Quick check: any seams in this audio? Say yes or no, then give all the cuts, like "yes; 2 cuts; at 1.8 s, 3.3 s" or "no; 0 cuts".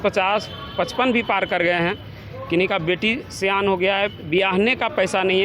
no; 0 cuts